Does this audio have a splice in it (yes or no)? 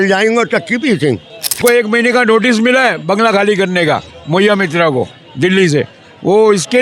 yes